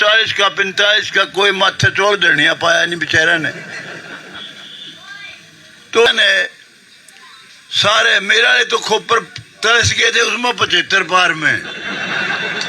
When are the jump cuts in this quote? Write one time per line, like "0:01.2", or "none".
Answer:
0:06.1

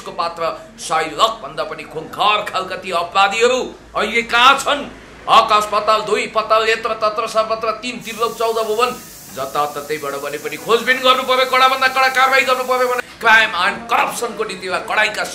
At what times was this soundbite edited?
0:13.0

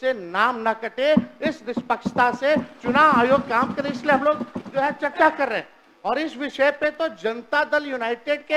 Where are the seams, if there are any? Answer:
none

